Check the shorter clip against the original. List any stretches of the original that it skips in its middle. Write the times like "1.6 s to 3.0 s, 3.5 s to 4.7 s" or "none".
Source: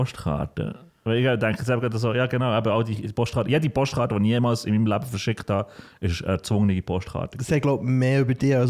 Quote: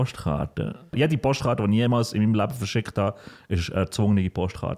0.9 s to 3.5 s